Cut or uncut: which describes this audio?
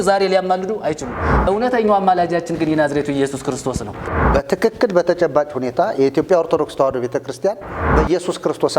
cut